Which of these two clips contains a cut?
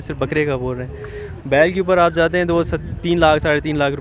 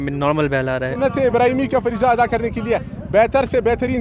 second; 1 cut; at 0.9 s

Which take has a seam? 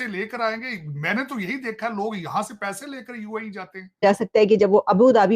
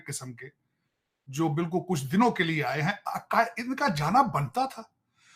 first; 1 cut; at 4.0 s

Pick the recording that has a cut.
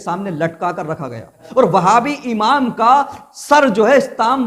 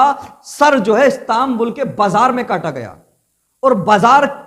first; 1 cut; at 1.4 s

